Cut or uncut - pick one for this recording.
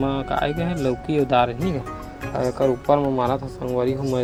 uncut